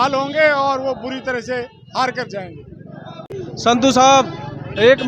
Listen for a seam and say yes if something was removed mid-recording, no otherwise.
no